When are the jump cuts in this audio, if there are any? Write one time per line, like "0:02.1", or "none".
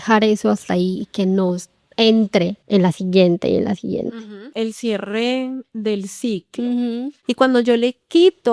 0:02.6
0:04.5
0:07.2